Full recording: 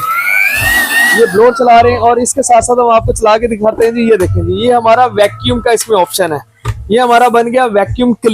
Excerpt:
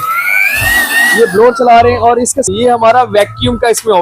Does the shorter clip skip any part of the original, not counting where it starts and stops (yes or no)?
yes